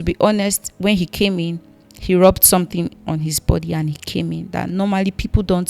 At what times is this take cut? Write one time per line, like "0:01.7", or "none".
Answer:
none